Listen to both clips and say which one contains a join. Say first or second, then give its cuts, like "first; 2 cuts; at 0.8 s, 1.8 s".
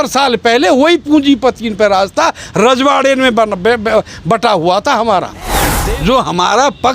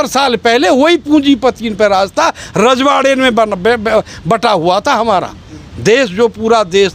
first; 1 cut; at 5.7 s